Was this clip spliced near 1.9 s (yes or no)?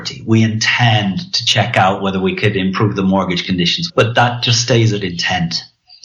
no